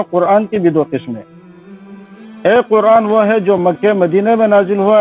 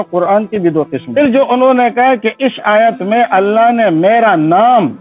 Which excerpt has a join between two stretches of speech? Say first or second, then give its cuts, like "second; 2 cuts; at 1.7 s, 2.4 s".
second; 1 cut; at 1.2 s